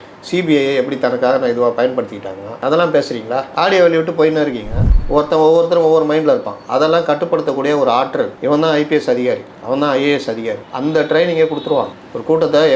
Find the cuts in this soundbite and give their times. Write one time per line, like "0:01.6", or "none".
0:04.9